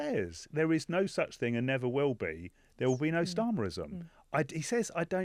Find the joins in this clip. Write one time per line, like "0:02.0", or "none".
none